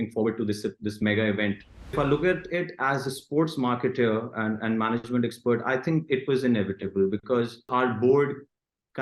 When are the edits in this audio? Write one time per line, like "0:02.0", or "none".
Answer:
0:01.9
0:07.7